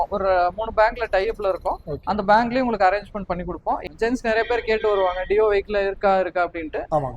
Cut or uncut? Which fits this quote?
cut